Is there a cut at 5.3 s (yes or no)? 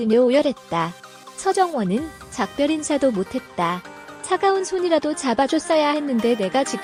no